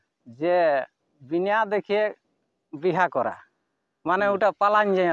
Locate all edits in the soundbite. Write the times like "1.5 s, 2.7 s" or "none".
none